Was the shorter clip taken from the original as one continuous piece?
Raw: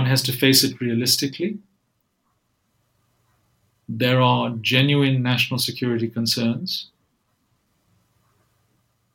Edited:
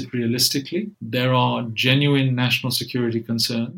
no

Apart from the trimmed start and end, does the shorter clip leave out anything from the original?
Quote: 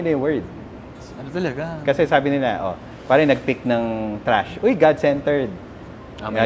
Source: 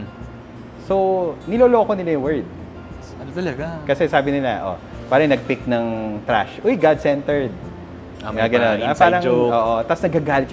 no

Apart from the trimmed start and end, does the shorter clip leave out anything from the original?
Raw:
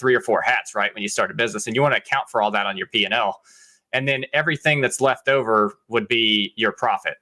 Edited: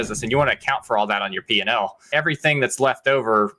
yes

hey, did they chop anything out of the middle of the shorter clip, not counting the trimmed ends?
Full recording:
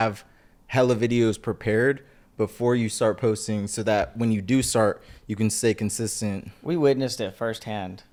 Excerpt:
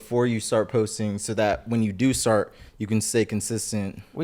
no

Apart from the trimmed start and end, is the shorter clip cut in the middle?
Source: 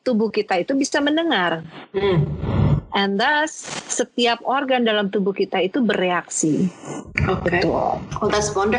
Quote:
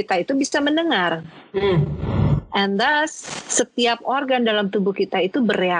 no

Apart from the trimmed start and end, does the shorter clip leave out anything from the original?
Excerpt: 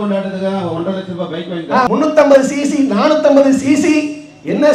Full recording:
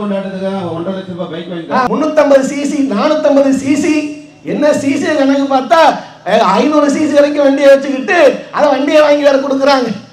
no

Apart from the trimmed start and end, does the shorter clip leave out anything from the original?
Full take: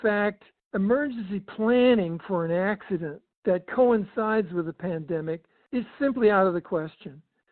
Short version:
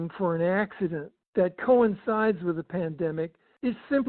no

